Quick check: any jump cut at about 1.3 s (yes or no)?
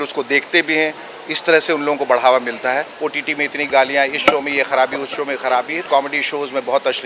no